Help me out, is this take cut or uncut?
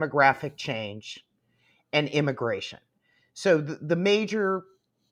uncut